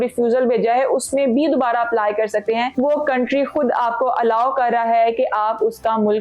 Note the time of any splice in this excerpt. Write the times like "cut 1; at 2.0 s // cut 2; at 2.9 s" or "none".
cut 1; at 2.7 s